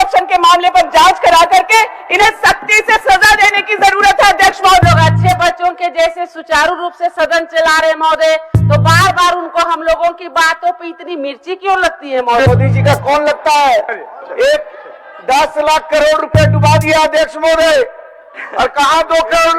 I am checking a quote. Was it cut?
yes; 2 cuts; at 4.8 s, 12.5 s

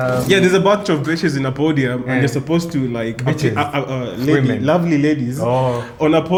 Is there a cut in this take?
no; 0 cuts

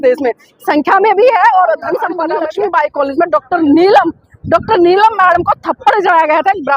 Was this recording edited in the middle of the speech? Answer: yes; 1 cut; at 2.3 s

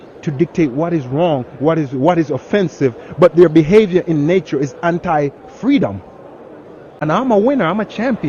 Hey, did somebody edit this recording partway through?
yes; 1 cut; at 7.0 s

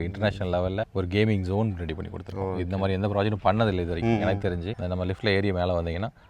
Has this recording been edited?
yes; 1 cut; at 4.7 s

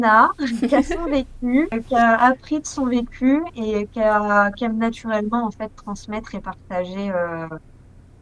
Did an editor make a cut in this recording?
yes; 1 cut; at 1.8 s

